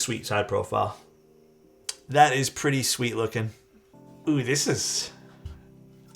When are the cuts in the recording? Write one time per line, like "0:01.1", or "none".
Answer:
none